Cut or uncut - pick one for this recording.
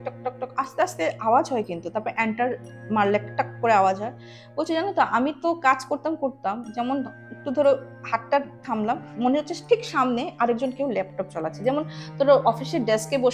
uncut